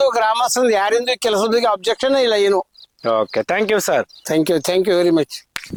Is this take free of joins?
yes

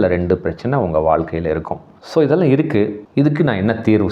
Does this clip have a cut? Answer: yes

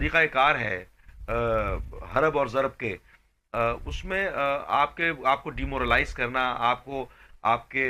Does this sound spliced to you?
no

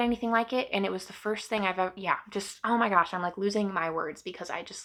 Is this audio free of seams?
yes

